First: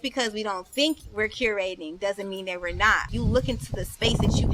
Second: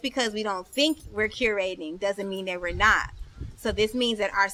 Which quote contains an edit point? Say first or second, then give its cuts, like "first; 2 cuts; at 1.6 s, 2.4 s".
first; 1 cut; at 3.1 s